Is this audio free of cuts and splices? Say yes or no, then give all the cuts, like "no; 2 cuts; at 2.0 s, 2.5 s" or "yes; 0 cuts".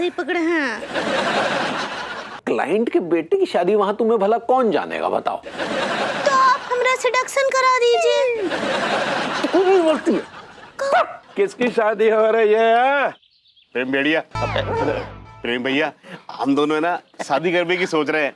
no; 2 cuts; at 2.4 s, 11.2 s